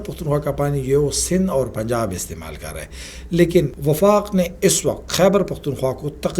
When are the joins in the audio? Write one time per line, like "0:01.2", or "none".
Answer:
0:03.8